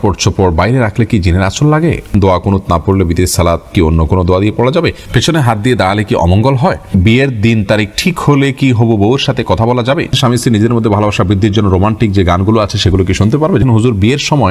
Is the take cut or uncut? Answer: cut